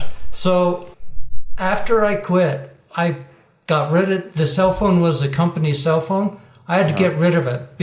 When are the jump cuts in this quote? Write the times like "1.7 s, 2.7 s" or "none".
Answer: 0.9 s